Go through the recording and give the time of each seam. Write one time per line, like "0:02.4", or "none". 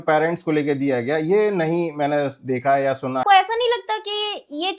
0:03.2